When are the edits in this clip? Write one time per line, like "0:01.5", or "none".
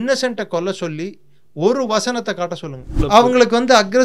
0:03.1

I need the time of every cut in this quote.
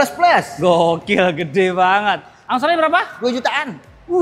0:02.3

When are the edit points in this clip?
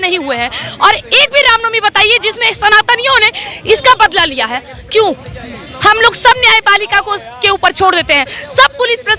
none

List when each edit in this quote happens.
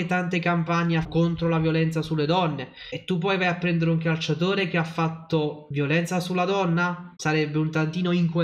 0:05.6
0:07.1

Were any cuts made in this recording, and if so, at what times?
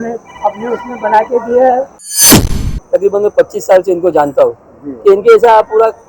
0:02.4

